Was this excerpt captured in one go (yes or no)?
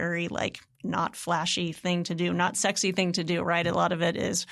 yes